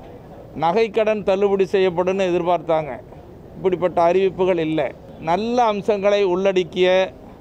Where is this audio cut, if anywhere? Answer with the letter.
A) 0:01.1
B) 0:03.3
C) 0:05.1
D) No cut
C